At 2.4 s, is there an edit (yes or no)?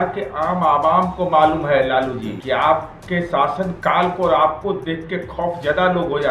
yes